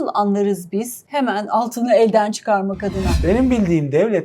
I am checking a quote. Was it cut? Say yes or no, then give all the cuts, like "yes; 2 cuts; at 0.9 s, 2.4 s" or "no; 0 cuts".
yes; 2 cuts; at 1.0 s, 3.1 s